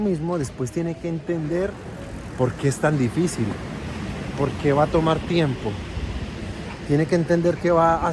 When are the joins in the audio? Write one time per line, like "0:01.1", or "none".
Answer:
none